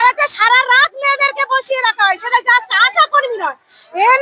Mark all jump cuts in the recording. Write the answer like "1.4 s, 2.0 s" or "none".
none